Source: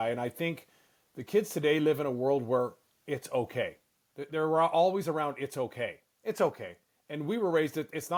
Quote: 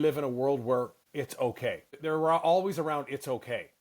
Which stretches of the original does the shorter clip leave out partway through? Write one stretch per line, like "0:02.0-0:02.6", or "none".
0:03.2-0:03.7